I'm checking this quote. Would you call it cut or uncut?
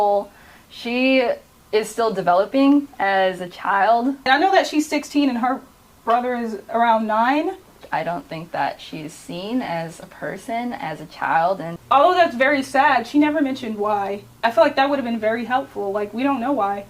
cut